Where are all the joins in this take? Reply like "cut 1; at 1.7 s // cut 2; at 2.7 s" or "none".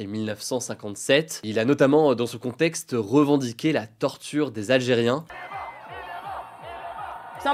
cut 1; at 5.2 s